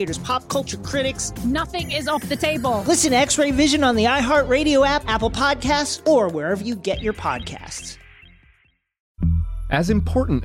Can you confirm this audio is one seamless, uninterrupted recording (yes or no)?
no